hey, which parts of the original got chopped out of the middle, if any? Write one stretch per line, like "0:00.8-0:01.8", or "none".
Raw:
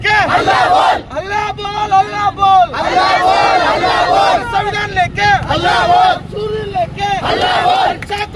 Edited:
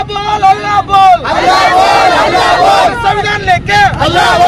none